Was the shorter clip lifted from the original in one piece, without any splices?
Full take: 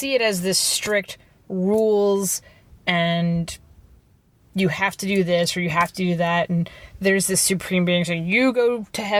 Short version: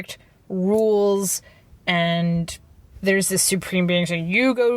no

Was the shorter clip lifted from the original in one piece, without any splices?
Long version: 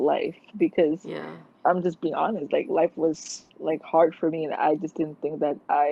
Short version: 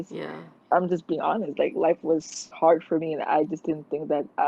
no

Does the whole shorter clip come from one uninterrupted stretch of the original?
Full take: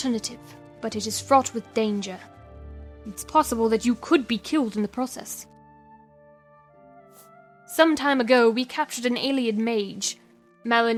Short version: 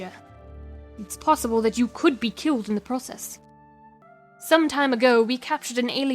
no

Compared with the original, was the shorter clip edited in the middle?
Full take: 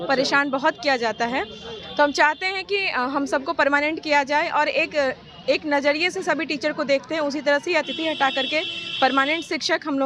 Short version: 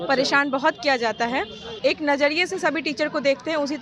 yes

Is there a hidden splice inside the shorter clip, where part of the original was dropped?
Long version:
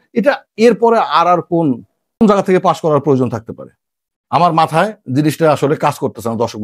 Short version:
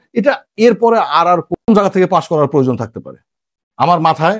yes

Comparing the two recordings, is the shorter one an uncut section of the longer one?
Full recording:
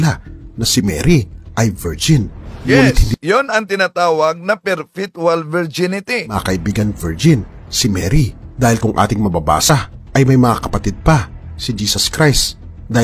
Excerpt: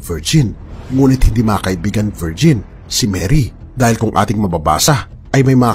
no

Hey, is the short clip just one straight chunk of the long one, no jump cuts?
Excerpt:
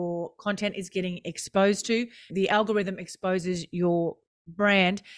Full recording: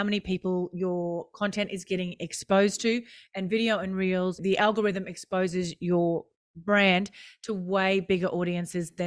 no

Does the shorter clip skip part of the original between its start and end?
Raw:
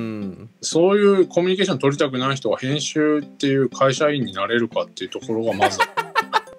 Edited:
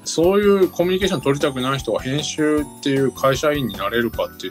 no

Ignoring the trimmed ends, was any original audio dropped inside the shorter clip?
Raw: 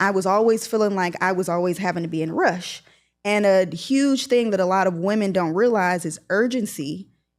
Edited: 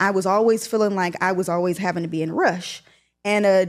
no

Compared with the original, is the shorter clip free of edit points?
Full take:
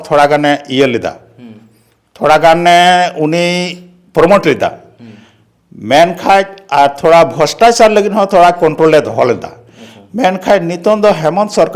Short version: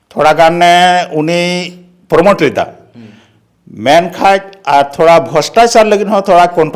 yes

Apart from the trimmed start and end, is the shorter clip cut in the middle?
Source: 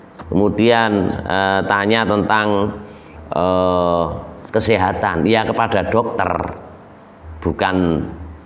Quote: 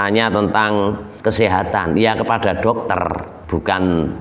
yes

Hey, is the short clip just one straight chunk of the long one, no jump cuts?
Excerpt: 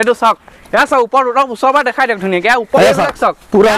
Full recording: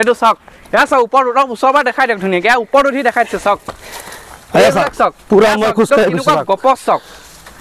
no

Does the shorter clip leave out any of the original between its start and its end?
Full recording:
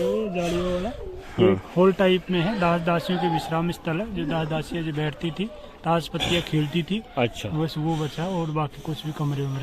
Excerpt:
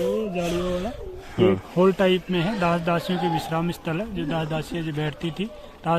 no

